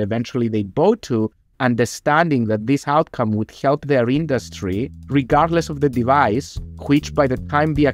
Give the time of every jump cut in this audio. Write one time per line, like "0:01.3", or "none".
none